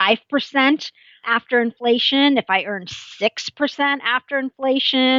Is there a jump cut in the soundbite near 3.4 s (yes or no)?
no